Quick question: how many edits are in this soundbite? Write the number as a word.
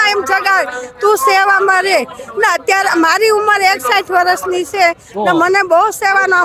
zero